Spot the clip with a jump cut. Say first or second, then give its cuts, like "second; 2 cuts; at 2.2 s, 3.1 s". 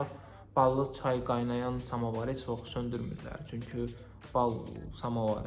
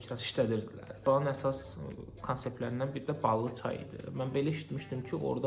second; 1 cut; at 1.1 s